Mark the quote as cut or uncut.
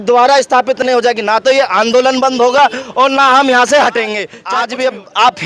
cut